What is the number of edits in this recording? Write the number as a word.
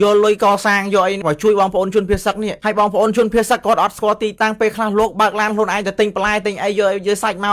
one